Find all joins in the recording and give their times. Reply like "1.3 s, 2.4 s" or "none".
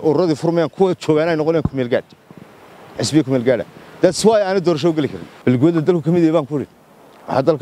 5.2 s

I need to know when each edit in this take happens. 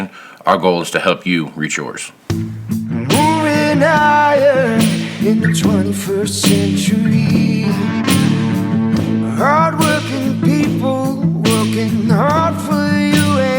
2.1 s

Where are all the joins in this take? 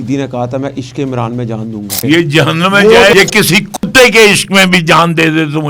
2.0 s, 3.1 s

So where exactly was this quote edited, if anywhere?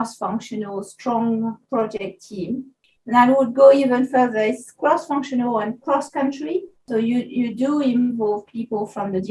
2.8 s, 6.9 s

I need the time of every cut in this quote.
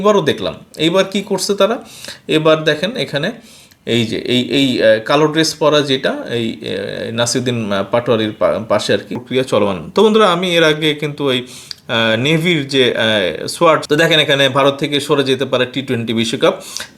9.2 s, 13.8 s

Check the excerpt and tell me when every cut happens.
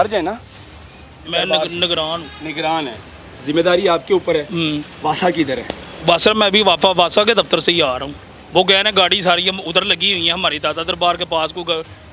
none

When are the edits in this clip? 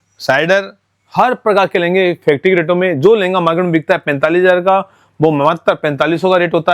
none

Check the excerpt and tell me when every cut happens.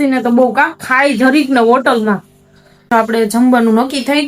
2.9 s

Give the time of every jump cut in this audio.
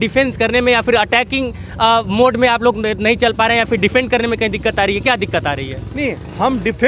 none

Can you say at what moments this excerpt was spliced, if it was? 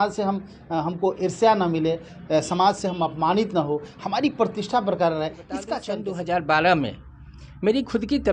5.8 s

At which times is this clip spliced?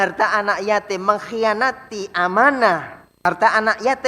3.0 s

